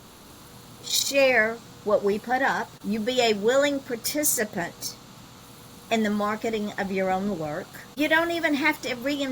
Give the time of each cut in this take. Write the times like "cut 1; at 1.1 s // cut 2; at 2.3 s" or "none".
cut 1; at 2.7 s // cut 2; at 8.0 s